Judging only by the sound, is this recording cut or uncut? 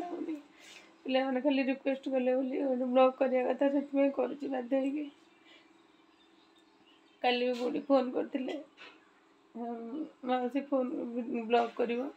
uncut